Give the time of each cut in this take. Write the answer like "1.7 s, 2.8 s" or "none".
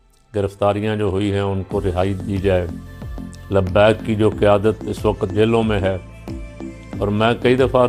none